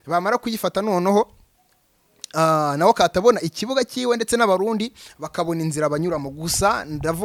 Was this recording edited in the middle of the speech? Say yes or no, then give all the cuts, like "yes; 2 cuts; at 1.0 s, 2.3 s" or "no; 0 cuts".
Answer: no; 0 cuts